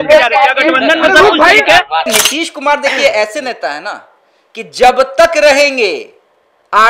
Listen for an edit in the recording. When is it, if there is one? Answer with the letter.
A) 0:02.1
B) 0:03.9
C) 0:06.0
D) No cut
A